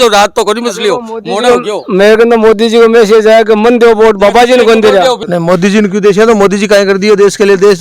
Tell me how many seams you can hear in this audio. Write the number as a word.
one